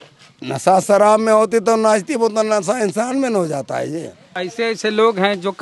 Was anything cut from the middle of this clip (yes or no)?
yes